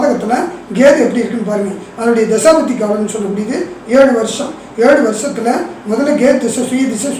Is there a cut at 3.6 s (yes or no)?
no